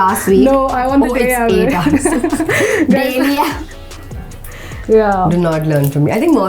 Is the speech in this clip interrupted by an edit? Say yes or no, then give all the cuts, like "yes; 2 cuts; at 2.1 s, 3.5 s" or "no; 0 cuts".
no; 0 cuts